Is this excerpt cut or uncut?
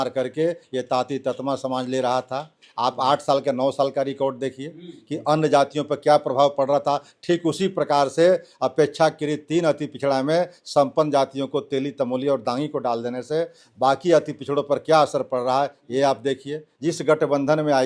cut